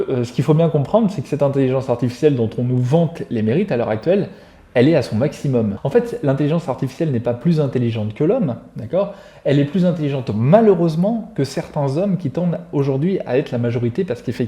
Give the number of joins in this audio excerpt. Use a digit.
1